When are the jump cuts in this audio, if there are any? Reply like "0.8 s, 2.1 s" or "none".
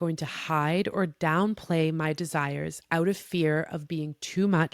none